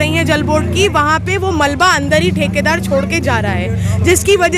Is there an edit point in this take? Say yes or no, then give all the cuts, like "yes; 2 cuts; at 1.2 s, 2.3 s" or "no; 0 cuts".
no; 0 cuts